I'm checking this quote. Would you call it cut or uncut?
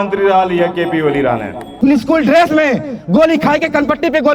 cut